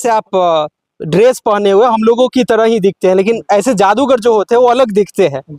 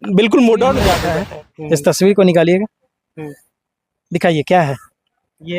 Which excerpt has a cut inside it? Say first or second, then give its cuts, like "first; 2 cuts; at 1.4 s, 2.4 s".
second; 1 cut; at 1.1 s